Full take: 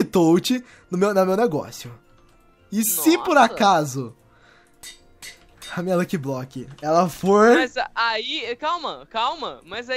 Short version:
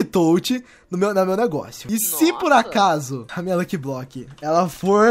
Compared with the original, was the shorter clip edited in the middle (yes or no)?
yes